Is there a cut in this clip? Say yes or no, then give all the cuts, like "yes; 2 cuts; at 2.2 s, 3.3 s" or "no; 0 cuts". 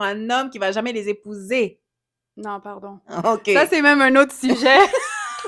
no; 0 cuts